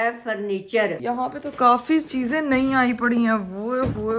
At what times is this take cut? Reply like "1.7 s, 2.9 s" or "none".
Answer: 0.9 s